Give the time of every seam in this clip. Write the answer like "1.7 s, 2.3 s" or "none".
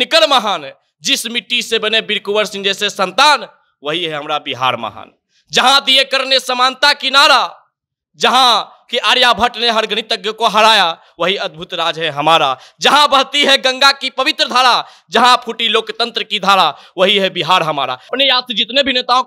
18.1 s